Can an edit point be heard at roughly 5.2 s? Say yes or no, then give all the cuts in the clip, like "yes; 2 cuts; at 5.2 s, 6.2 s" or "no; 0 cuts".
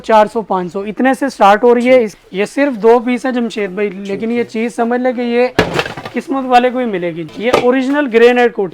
no; 2 cuts; at 2.1 s, 7.2 s